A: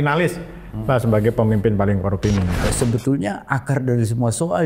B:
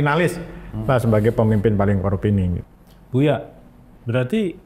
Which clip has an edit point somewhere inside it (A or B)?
A